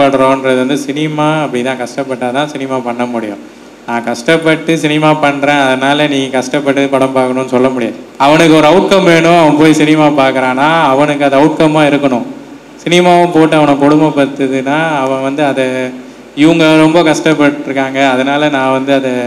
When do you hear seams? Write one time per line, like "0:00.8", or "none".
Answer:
0:08.0